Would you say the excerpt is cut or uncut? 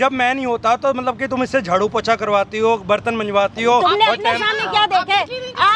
uncut